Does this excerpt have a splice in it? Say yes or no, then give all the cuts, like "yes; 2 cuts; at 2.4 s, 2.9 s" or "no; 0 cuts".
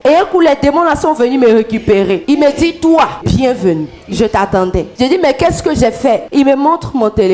yes; 4 cuts; at 2.2 s, 3.2 s, 4.9 s, 6.2 s